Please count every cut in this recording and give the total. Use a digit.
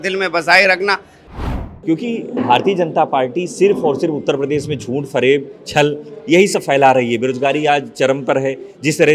1